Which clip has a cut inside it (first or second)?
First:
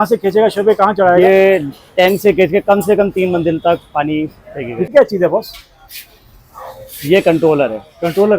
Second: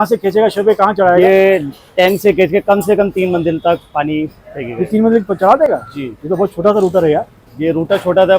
first